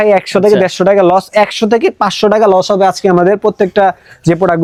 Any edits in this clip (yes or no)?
no